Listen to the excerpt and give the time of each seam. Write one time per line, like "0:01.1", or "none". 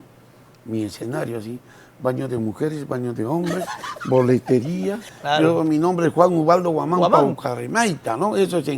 0:05.1